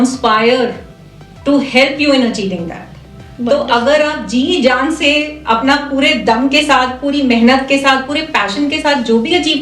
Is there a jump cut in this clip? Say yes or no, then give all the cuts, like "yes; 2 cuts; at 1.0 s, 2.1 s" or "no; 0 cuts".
no; 0 cuts